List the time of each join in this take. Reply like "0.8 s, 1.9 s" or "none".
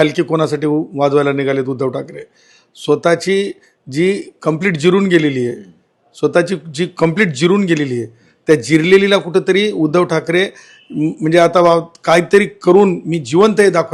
none